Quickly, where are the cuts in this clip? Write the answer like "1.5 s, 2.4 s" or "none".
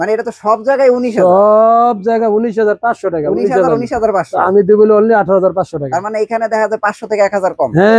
none

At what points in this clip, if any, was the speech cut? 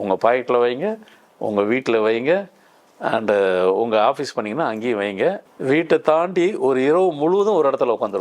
5.5 s

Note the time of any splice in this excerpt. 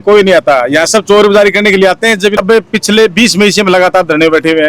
2.4 s

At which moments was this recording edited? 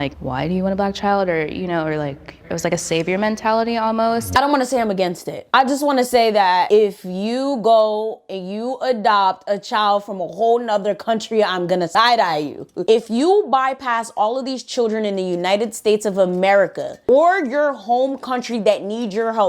4.3 s

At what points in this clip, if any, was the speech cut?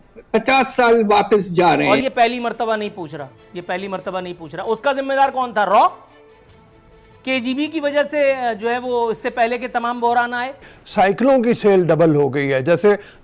1.9 s, 10.7 s

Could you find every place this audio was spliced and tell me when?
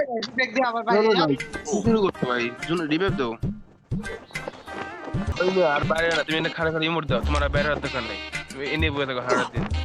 1.7 s, 5.3 s, 8.4 s

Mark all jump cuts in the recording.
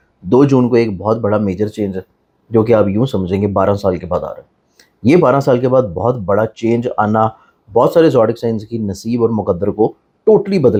none

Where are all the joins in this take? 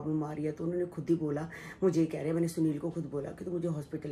none

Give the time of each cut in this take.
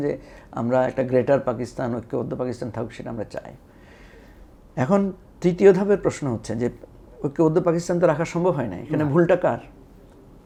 none

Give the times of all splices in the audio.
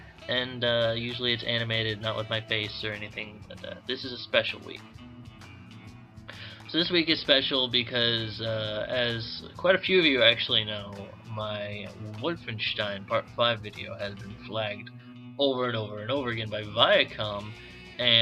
4.4 s

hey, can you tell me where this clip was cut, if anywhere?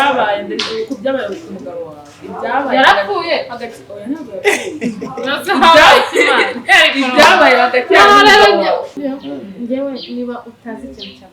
8.9 s

